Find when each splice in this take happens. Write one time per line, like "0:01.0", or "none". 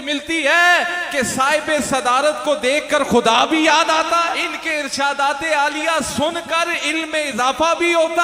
0:04.5